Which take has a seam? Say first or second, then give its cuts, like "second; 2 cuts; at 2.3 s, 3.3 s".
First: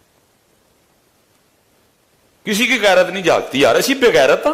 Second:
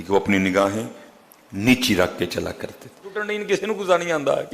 second; 1 cut; at 3.3 s